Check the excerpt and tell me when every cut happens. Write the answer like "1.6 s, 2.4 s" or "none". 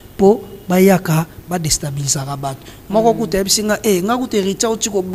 none